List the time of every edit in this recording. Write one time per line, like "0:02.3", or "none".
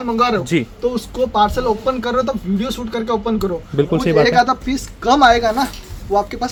none